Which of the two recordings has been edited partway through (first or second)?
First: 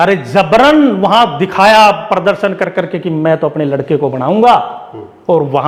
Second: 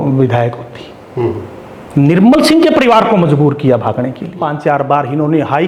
second